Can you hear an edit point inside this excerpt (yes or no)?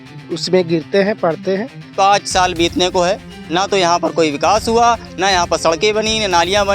yes